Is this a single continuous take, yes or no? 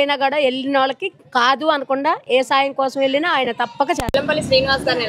no